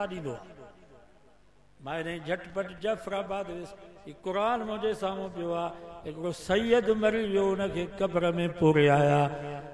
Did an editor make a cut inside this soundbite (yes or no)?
no